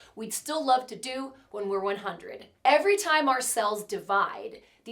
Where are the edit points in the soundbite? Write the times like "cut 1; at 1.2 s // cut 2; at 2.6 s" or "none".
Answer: cut 1; at 2.4 s